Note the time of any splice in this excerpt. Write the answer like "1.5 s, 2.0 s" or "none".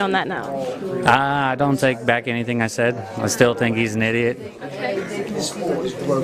4.7 s